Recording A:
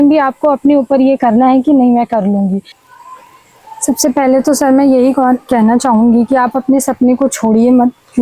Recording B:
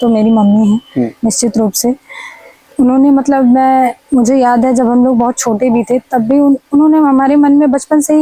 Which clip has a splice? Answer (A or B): A